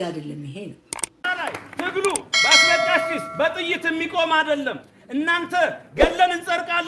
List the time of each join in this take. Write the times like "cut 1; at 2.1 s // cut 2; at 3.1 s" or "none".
cut 1; at 1.2 s